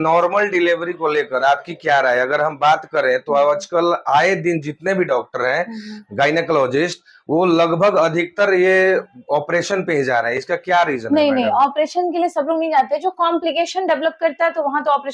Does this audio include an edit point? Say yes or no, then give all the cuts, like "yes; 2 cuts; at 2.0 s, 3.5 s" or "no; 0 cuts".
no; 0 cuts